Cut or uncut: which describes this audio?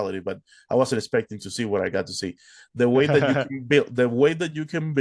uncut